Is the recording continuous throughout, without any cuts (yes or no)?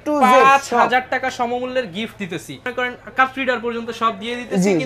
no